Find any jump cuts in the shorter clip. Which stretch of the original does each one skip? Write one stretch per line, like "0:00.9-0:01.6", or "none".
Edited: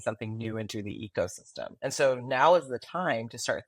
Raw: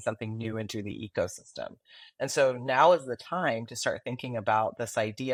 0:01.7-0:02.1